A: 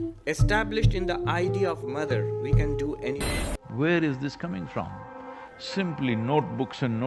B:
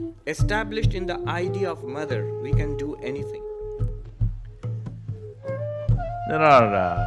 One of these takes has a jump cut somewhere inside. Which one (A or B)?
A